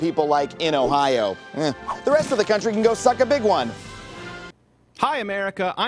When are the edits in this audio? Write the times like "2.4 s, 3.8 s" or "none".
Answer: 4.4 s